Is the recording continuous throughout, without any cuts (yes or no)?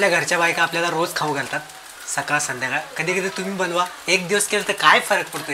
yes